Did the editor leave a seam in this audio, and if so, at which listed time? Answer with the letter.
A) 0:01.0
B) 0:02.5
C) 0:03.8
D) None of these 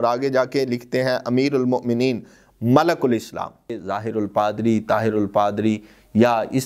C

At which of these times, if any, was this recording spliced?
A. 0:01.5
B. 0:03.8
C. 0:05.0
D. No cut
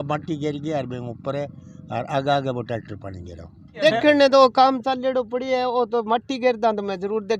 B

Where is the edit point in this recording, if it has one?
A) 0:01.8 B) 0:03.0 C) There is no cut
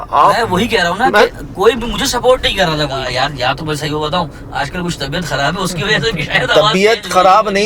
B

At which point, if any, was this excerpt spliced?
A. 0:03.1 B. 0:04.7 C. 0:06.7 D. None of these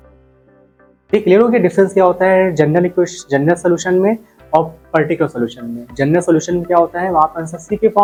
D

